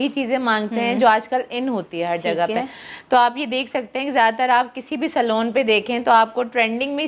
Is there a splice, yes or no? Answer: no